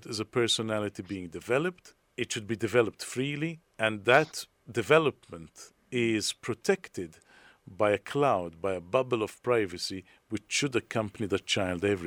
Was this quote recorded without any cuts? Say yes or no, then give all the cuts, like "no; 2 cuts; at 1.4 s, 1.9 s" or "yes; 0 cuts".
yes; 0 cuts